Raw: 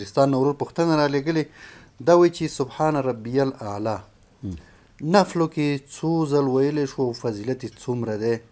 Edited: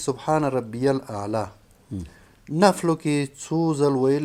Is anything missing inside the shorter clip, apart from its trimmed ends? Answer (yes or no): no